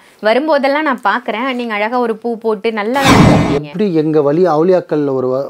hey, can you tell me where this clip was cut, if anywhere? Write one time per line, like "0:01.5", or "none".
0:03.3

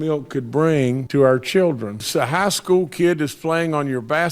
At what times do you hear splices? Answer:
0:01.0
0:02.0

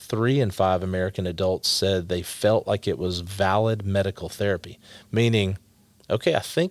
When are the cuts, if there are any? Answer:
none

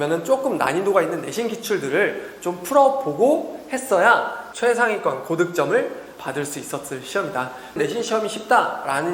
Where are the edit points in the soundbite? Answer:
0:04.4
0:07.8

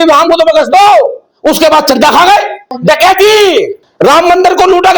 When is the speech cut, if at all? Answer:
0:01.2
0:02.8
0:03.8

